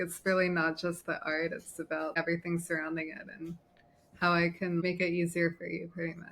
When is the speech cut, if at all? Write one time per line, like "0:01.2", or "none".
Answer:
0:02.1
0:04.8

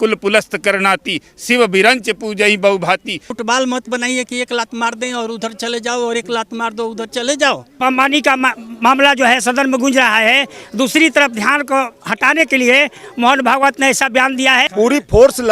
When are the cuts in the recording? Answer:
0:03.3
0:07.8
0:14.6

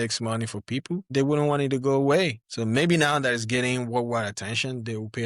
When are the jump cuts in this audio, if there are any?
0:01.1
0:02.5

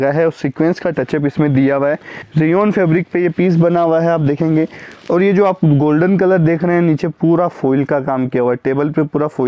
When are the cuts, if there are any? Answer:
0:02.1

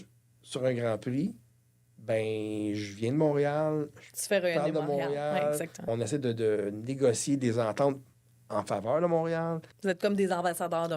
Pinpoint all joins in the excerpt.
0:05.8
0:09.7

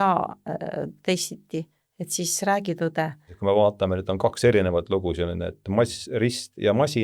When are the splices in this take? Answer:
0:03.3

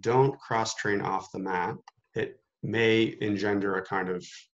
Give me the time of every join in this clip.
0:01.9

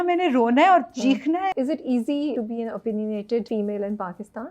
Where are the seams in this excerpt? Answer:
0:01.5
0:02.3
0:03.5

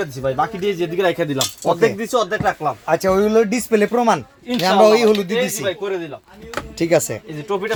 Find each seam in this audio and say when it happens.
none

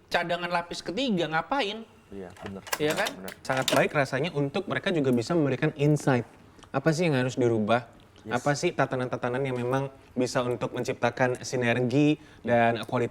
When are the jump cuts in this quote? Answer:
0:03.4

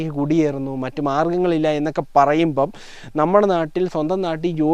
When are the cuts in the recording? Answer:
none

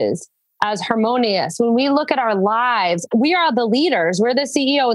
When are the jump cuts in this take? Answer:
0:03.0

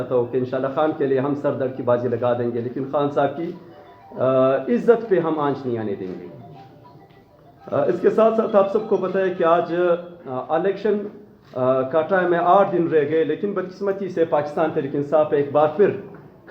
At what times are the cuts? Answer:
none

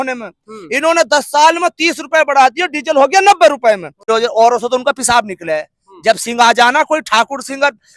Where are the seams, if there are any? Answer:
0:04.1

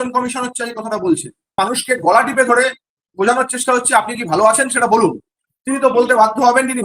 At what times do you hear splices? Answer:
0:01.5

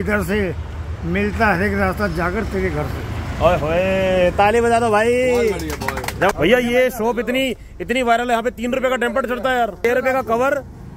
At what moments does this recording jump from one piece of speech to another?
0:06.3
0:09.8

